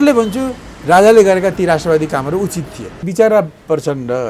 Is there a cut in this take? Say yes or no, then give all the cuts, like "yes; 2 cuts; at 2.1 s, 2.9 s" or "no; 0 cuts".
yes; 1 cut; at 3.0 s